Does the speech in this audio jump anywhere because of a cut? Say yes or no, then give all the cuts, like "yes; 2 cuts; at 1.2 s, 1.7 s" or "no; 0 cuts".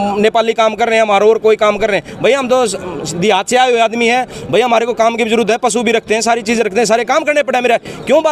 no; 0 cuts